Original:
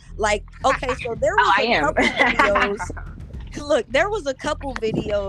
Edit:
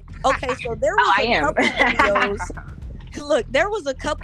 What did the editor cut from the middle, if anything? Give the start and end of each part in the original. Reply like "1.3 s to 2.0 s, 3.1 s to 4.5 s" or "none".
none